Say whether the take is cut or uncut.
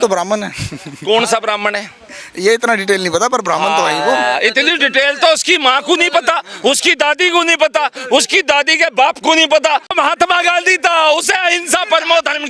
cut